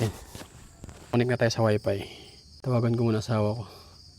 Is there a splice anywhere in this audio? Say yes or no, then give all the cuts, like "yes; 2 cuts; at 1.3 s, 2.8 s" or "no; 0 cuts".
yes; 1 cut; at 1.1 s